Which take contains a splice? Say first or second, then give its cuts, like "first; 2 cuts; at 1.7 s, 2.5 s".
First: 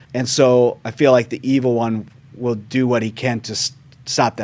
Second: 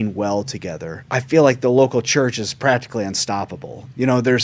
second; 1 cut; at 0.9 s